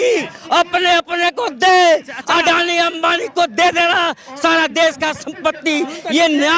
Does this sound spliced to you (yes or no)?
no